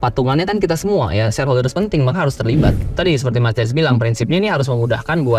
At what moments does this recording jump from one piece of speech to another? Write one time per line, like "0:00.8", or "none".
0:02.8

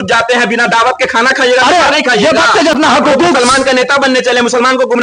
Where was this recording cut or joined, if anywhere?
0:02.8

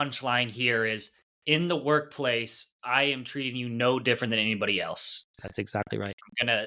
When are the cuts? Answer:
none

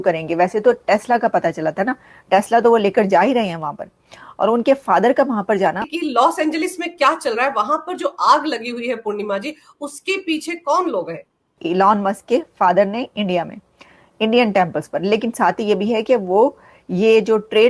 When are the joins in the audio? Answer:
0:05.9
0:11.5

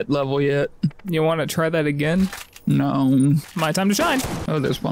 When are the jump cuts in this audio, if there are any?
0:03.4

